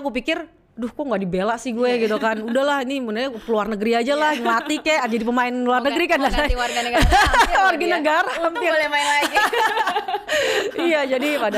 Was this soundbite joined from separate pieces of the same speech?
no; 0 cuts

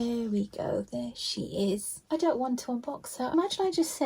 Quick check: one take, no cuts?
no; 2 cuts; at 1.9 s, 3.3 s

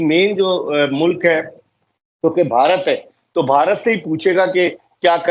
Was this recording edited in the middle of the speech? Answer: no; 0 cuts

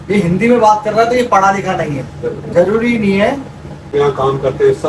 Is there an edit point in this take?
yes; 1 cut; at 3.9 s

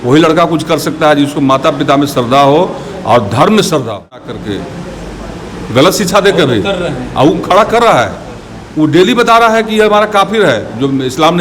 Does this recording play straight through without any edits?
no; 1 cut; at 4.3 s

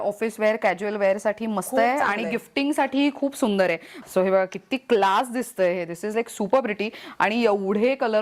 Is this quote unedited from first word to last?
no; 1 cut; at 4.0 s

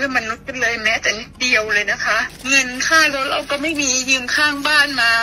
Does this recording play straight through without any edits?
no; 1 cut; at 2.3 s

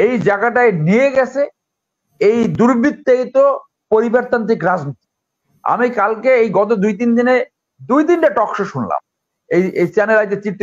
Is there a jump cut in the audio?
no; 0 cuts

